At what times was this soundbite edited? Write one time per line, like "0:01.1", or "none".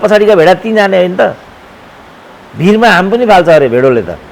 none